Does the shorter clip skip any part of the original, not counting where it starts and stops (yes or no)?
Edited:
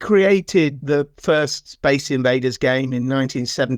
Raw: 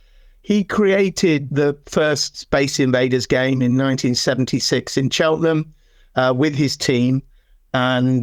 no